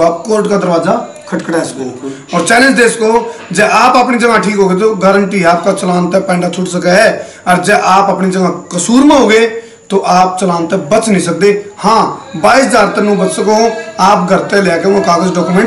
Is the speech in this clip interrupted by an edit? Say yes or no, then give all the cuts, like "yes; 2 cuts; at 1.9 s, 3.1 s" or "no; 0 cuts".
no; 0 cuts